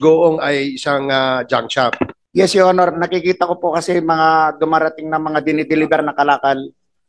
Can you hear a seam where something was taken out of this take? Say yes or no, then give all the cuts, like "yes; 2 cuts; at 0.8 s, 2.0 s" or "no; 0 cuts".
yes; 1 cut; at 2.2 s